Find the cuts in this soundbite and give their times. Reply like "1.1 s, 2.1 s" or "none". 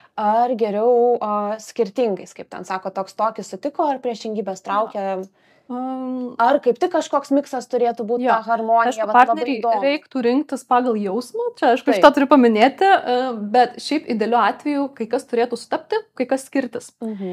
none